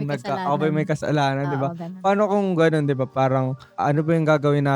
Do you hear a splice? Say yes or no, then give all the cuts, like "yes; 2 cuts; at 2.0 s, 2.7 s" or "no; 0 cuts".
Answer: yes; 1 cut; at 3.6 s